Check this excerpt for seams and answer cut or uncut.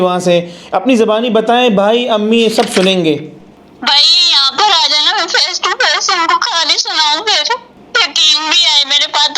cut